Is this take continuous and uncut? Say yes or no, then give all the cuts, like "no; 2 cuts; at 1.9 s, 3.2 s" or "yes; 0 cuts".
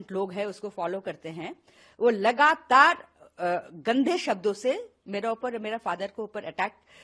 yes; 0 cuts